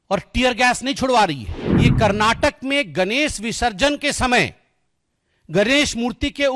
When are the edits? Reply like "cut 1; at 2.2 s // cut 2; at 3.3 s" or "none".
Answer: cut 1; at 1.9 s